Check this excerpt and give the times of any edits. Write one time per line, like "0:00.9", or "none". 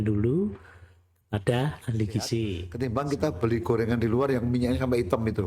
0:02.6